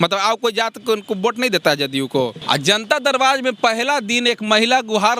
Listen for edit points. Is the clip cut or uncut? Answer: cut